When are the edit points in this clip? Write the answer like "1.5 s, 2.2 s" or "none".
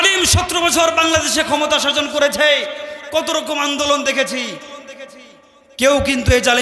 none